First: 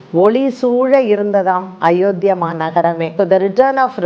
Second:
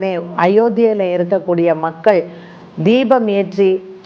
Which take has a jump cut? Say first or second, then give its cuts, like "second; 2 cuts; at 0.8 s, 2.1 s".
first; 1 cut; at 3.0 s